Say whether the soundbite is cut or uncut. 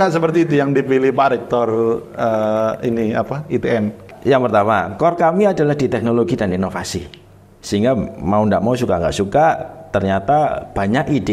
cut